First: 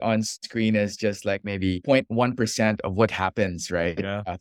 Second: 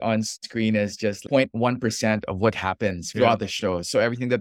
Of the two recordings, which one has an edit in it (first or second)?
second